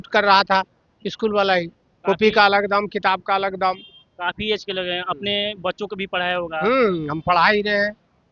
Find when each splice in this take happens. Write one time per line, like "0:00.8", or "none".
none